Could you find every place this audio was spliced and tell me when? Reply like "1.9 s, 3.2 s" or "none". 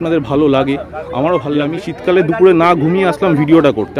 1.9 s

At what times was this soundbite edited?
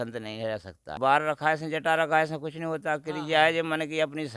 0.9 s

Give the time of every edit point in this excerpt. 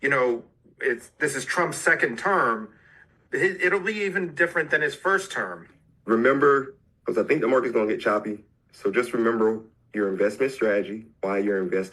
5.7 s

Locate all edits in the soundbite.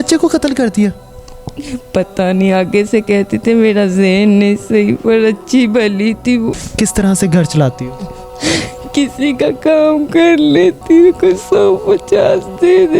6.6 s

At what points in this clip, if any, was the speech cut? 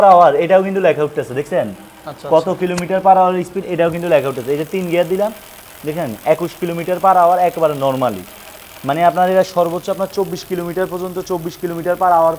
none

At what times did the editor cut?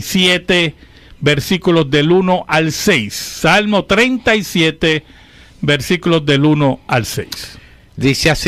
1.3 s

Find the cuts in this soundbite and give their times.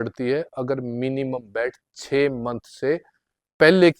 none

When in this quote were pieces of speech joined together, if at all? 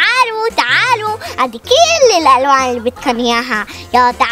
none

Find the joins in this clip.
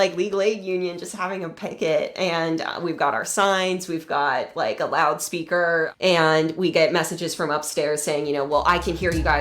5.9 s

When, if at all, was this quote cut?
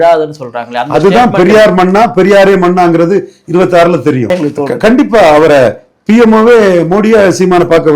4.3 s

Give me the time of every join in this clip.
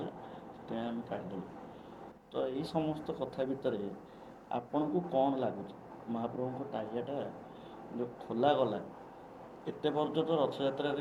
none

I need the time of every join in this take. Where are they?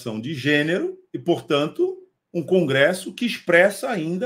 1.1 s

